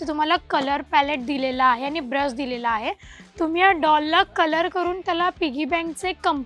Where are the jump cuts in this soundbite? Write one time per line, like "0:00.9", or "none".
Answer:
none